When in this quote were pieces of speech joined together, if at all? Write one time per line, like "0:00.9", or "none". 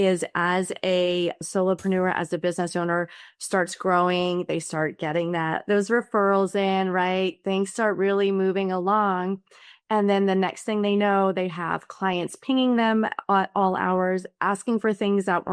0:01.4

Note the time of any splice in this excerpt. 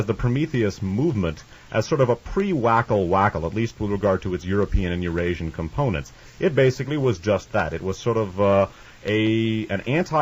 none

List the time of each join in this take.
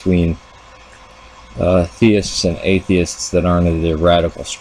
0:02.1

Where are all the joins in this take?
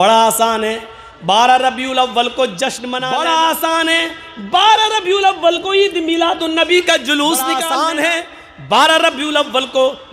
0:02.9
0:07.6

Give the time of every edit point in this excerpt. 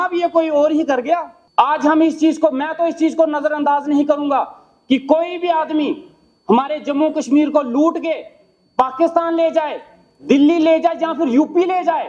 0:01.4

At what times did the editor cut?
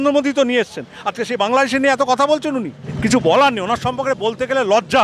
0:02.8

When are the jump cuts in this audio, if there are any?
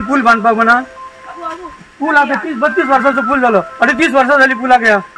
none

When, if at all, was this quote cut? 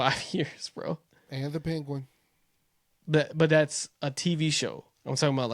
none

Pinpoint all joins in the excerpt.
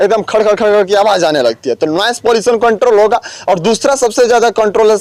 none

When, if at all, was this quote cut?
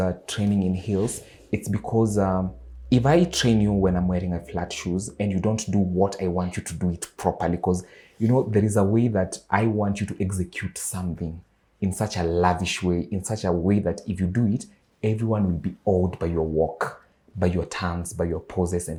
none

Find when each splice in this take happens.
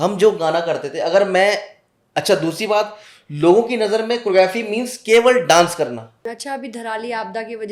0:06.1

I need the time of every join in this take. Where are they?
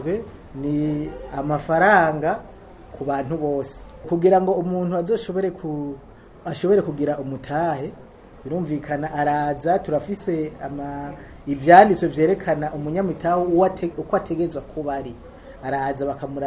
0:03.9

